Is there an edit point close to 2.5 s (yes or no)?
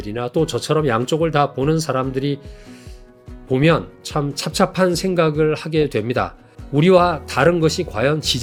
no